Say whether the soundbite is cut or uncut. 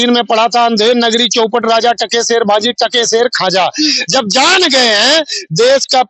uncut